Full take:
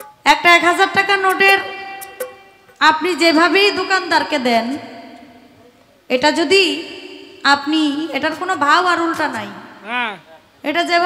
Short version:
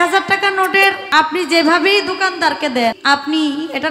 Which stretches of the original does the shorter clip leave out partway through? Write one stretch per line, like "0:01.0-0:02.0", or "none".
0:01.7-0:02.7
0:04.7-0:07.4